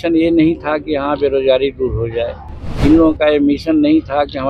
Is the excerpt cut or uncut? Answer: uncut